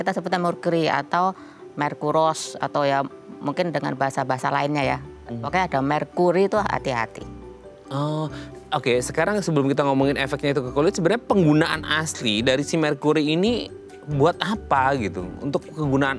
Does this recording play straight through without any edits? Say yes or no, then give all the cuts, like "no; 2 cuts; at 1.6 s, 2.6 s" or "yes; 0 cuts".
yes; 0 cuts